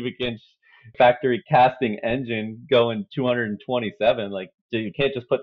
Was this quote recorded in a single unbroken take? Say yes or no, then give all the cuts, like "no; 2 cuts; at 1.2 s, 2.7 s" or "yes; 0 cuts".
no; 2 cuts; at 0.9 s, 4.5 s